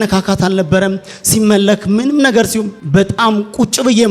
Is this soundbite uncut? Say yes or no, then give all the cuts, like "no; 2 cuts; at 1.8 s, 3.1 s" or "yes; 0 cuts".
no; 1 cut; at 2.8 s